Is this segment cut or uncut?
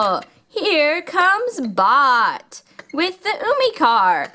uncut